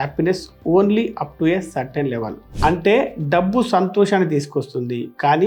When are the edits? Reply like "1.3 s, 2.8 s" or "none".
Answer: none